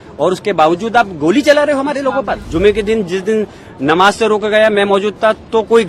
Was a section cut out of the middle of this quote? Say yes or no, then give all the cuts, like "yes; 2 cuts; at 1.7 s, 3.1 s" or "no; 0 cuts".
yes; 1 cut; at 2.4 s